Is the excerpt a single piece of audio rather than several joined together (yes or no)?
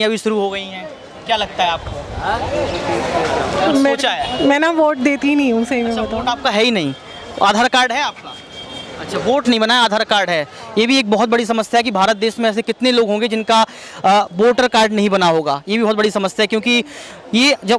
yes